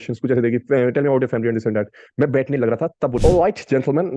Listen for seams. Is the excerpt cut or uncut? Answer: cut